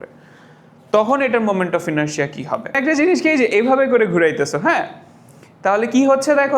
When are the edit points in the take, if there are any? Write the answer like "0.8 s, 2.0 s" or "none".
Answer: 2.8 s